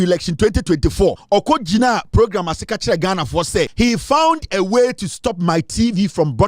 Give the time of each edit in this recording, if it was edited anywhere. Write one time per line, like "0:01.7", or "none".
0:01.2
0:03.7